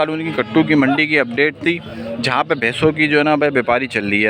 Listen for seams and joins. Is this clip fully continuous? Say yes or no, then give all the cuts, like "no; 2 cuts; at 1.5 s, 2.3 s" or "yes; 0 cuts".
yes; 0 cuts